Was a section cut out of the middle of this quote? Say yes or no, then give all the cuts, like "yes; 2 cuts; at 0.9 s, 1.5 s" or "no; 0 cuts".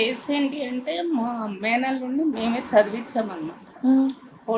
no; 0 cuts